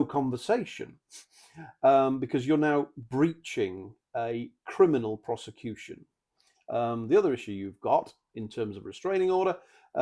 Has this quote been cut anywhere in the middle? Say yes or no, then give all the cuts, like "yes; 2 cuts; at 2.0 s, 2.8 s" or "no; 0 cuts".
no; 0 cuts